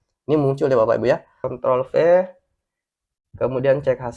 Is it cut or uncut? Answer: cut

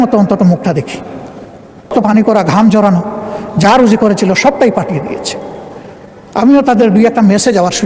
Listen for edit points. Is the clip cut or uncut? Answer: cut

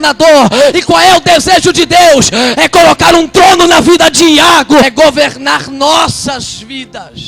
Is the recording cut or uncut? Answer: cut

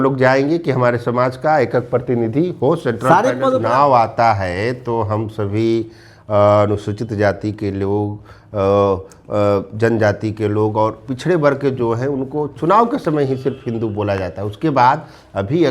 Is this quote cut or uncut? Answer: cut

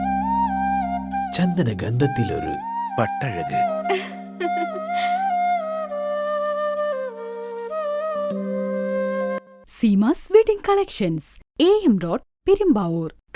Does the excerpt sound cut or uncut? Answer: uncut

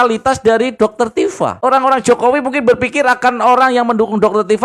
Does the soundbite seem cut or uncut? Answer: cut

